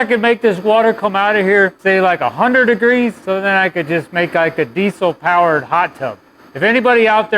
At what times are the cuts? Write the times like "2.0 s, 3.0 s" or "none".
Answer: 1.8 s, 3.2 s